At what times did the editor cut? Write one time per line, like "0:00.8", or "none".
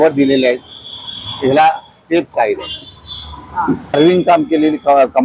0:03.9